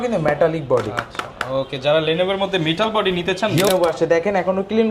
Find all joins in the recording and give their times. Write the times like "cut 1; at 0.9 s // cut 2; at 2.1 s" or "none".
cut 1; at 3.7 s